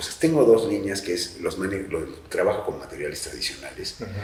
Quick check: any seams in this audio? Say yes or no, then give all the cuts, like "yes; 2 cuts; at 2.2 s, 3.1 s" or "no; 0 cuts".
no; 0 cuts